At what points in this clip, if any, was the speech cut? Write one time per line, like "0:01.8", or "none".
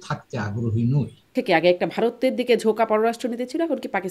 0:01.2